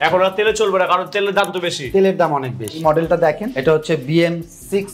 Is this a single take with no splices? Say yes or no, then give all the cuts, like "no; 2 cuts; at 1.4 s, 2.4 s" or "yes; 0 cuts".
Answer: no; 2 cuts; at 2.8 s, 3.5 s